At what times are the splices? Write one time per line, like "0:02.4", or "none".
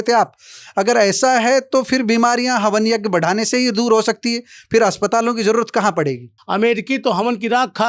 0:06.3